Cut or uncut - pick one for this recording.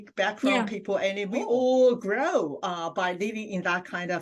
cut